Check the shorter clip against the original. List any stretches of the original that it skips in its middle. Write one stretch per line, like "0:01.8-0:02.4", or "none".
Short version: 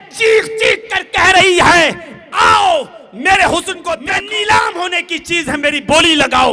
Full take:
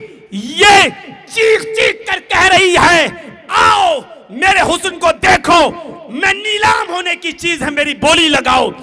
0:05.1-0:06.0